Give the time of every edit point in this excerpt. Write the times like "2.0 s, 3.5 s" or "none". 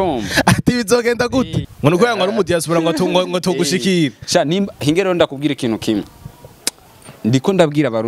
1.6 s